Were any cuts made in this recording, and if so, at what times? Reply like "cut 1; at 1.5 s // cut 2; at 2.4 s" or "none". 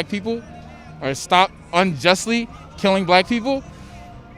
none